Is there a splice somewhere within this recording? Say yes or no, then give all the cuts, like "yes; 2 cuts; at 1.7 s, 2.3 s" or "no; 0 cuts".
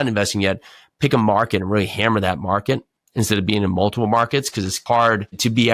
yes; 1 cut; at 4.7 s